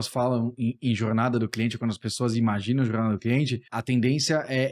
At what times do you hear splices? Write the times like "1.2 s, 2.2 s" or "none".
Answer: 3.7 s